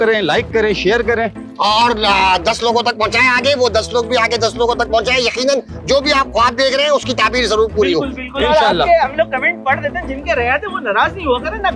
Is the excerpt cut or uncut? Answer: uncut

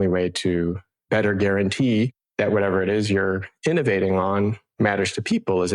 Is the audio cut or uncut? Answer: cut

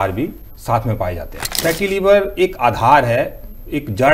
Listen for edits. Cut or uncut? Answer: cut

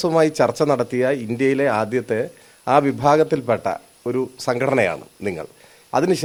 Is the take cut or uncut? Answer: uncut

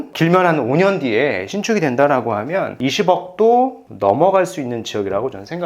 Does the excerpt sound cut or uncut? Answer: cut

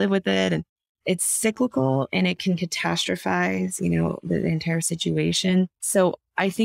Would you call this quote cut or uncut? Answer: cut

